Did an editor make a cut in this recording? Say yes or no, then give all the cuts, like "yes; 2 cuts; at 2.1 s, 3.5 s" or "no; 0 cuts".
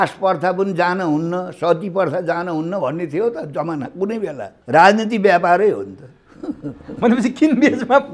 yes; 1 cut; at 4.5 s